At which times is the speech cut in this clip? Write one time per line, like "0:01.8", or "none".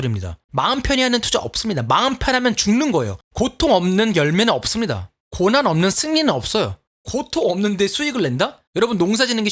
0:03.2
0:06.8
0:08.6